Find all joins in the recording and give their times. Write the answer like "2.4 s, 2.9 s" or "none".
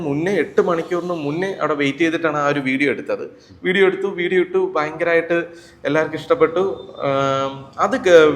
none